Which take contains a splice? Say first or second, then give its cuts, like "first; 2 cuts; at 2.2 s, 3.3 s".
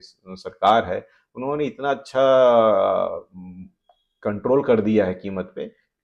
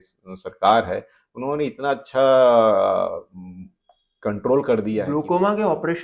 second; 1 cut; at 5.0 s